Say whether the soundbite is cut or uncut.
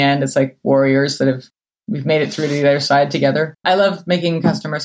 cut